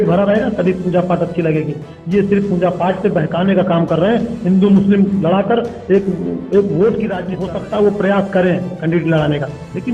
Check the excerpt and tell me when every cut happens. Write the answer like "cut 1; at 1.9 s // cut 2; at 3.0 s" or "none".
cut 1; at 7.3 s